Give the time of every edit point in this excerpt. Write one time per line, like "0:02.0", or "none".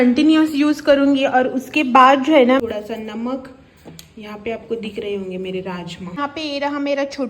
0:02.6
0:06.2